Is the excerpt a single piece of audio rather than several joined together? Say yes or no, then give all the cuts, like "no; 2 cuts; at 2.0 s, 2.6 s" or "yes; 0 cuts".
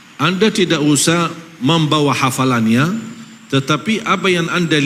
yes; 0 cuts